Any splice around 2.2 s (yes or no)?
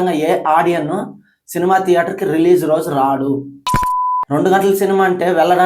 no